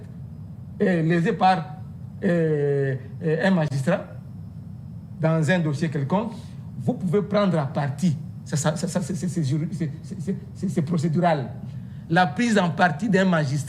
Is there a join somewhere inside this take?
no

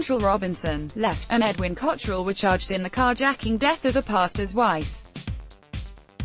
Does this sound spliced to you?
yes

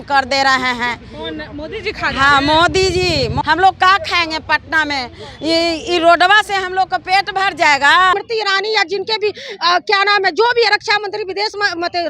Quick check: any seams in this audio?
yes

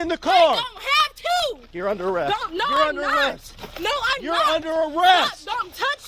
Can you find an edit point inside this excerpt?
no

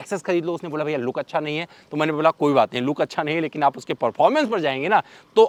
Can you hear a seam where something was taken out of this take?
no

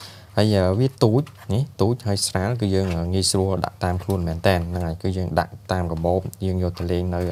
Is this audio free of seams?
yes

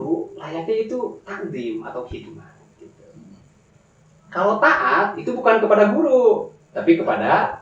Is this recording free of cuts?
yes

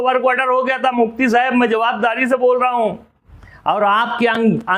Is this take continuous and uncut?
yes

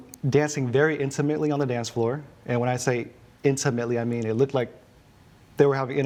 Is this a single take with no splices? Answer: yes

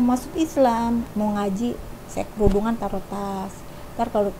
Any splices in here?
yes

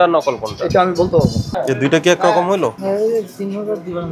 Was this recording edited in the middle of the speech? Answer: yes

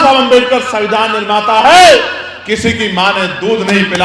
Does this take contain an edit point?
no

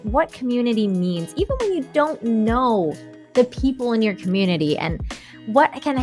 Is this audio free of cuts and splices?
yes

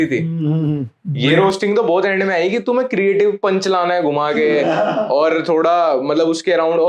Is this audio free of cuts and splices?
yes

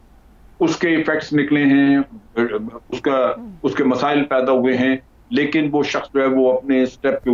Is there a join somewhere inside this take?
no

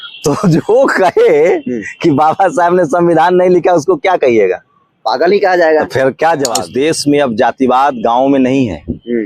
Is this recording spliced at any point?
yes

